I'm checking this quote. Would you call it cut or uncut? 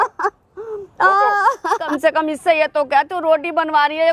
cut